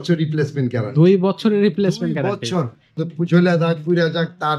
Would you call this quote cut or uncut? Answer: uncut